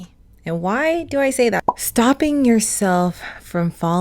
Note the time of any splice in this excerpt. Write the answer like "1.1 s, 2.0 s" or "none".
1.6 s